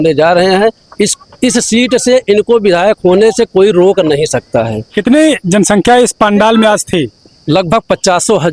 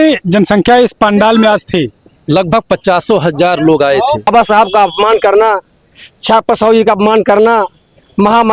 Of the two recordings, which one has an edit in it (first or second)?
second